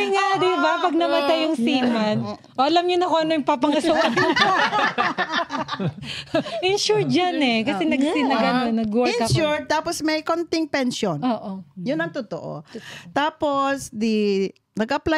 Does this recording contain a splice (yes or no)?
no